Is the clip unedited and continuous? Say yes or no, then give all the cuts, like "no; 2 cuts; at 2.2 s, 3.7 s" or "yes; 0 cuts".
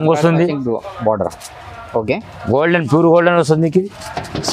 yes; 0 cuts